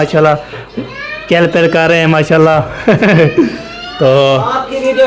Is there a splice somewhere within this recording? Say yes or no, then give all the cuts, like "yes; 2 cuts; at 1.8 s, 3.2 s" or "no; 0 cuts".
no; 0 cuts